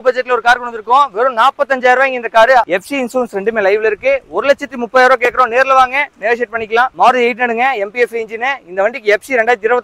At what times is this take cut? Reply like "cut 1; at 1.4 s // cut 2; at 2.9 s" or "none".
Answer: cut 1; at 2.7 s // cut 2; at 6.9 s